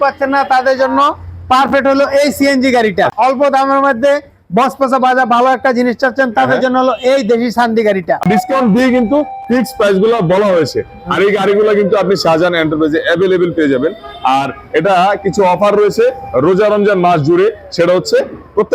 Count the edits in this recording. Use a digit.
2